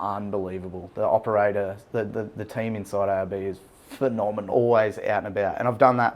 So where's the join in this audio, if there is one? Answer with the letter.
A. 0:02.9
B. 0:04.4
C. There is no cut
B